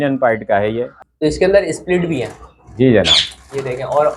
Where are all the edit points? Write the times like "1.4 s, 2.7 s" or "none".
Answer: 1.0 s